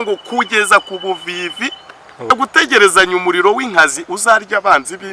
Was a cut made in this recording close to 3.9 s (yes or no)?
no